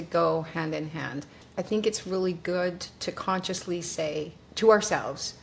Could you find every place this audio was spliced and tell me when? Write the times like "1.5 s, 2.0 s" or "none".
1.4 s, 4.4 s